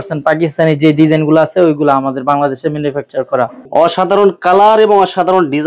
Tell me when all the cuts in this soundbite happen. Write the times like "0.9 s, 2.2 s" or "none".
3.6 s

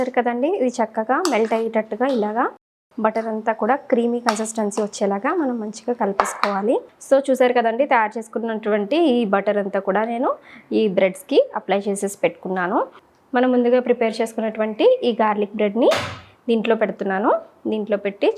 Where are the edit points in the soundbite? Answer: 6.9 s, 12.9 s

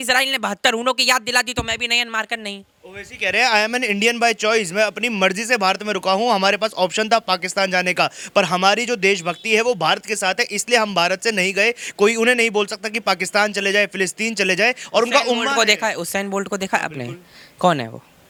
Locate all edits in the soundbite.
none

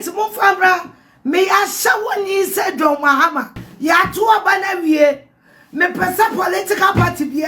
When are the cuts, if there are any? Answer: 3.6 s

